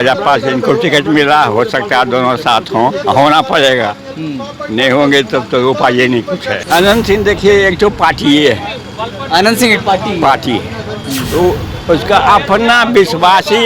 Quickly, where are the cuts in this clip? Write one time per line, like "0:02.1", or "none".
0:06.5